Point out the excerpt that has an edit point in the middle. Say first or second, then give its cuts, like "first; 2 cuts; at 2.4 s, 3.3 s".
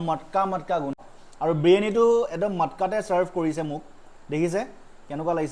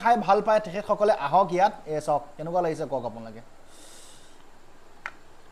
first; 1 cut; at 1.0 s